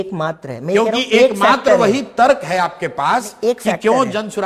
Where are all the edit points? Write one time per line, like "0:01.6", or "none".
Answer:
none